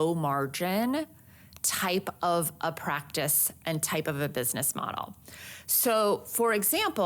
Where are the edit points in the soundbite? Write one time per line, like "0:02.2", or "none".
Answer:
none